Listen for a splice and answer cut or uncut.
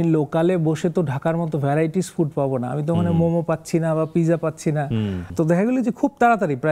cut